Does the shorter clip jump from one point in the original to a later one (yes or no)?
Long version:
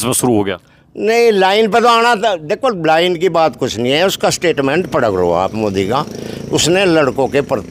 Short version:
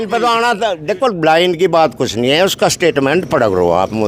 no